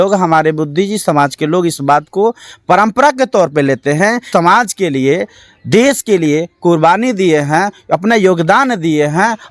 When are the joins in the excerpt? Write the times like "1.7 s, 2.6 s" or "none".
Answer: 4.3 s